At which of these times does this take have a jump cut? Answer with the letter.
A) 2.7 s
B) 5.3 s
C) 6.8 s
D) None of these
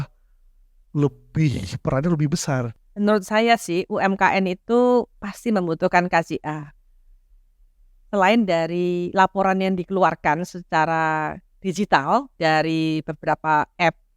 A